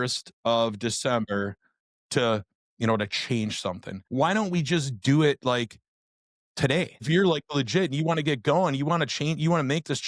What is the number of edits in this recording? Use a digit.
2